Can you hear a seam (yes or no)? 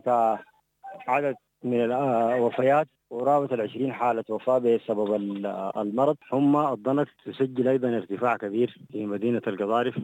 yes